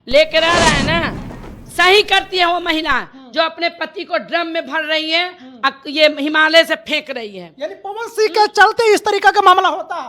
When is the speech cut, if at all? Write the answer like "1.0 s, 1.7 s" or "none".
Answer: 1.4 s